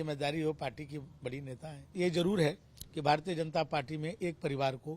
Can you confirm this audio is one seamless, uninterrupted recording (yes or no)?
no